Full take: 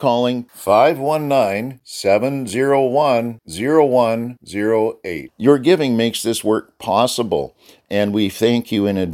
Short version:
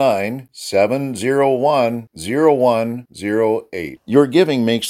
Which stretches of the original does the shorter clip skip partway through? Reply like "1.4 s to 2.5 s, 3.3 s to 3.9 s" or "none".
none